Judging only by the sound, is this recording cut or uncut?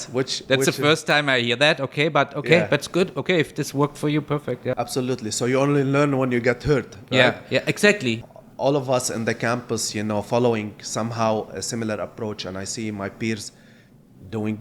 cut